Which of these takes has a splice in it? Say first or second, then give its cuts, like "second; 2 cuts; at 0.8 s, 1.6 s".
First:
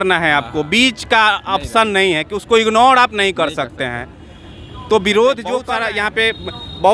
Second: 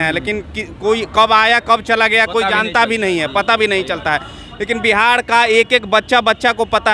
first; 1 cut; at 5.7 s